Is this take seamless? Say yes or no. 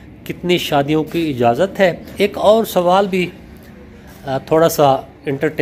no